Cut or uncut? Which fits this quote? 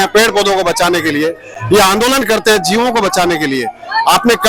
uncut